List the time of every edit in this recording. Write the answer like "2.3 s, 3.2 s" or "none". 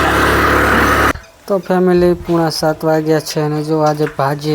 1.2 s